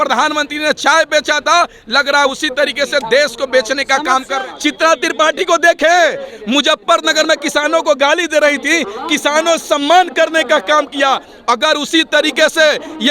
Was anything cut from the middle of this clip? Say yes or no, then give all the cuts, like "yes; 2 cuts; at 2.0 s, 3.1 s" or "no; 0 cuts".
yes; 1 cut; at 4.3 s